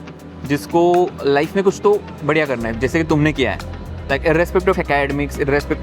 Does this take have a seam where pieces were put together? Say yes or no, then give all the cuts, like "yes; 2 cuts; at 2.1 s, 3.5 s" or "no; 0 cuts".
no; 0 cuts